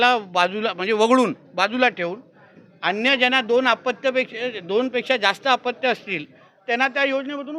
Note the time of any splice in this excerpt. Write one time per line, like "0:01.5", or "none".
none